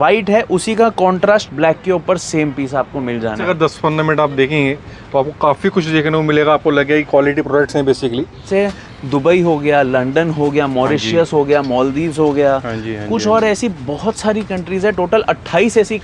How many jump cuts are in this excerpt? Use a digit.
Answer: 2